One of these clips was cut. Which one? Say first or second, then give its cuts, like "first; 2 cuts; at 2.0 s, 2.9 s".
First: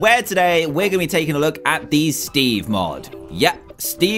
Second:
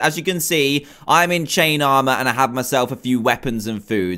second; 1 cut; at 2.1 s